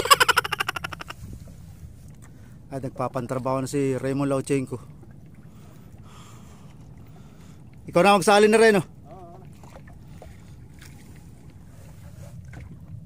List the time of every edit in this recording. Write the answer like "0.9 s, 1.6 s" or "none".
1.2 s